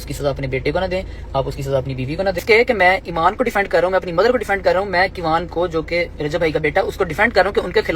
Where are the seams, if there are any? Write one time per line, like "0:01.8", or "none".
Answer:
0:02.4